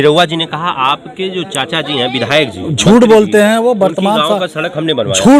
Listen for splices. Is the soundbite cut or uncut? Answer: uncut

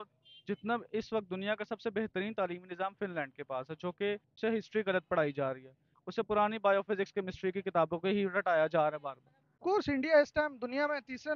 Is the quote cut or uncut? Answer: cut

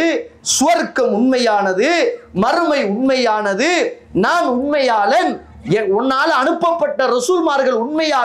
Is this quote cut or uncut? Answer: uncut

